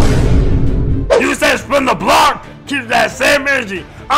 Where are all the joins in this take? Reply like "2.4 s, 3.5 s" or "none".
1.1 s